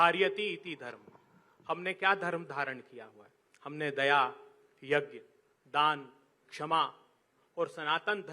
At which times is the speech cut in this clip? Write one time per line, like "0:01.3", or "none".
none